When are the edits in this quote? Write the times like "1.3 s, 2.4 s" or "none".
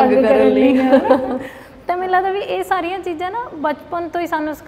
none